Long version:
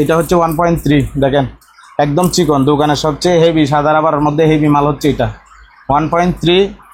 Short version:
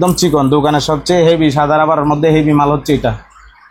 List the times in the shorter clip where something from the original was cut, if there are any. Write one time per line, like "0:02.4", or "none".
none